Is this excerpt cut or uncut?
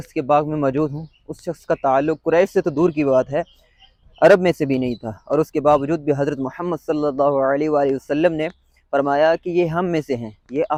uncut